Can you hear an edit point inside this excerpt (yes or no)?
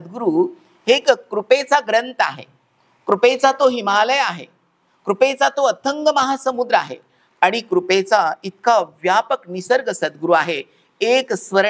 no